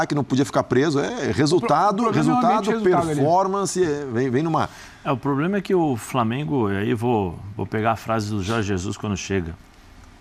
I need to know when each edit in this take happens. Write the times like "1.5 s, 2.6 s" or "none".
none

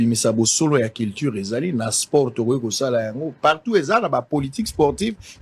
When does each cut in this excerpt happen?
none

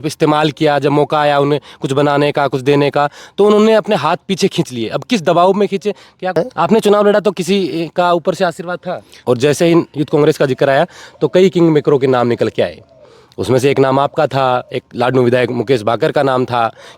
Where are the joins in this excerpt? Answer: 6.4 s, 9.2 s

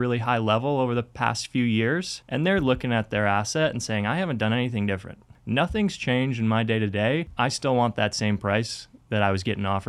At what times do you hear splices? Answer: 2.2 s, 5.4 s, 7.3 s

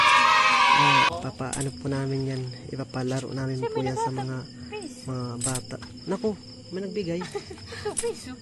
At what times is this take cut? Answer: 1.1 s

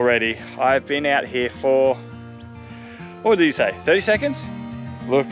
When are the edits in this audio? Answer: none

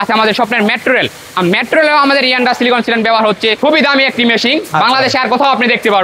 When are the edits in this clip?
3.6 s

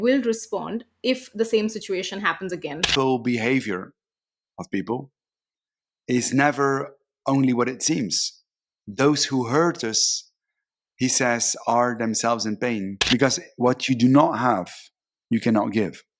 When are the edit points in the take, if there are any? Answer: 2.9 s, 12.9 s

